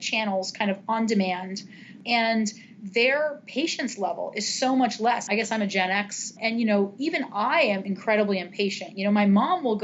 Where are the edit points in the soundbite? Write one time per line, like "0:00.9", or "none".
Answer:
0:02.0
0:05.2
0:06.4
0:07.9